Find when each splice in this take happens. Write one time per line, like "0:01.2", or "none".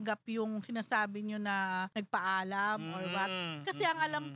0:01.9

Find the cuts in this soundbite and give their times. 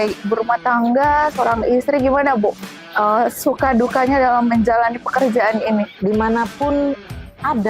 0:05.9

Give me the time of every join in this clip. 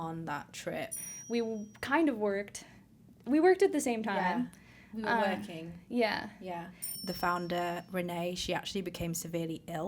0:01.1
0:07.0

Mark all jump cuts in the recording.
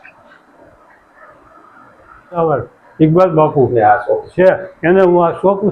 0:02.4

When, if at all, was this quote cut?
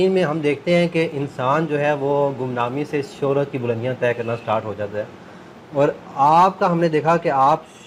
none

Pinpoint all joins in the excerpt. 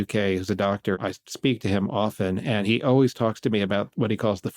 0:01.0

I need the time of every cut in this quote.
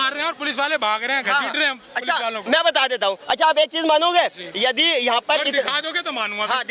none

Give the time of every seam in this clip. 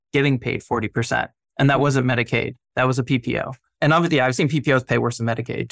none

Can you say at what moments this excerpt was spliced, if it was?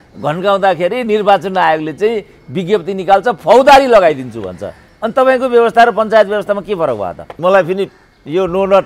0:07.3

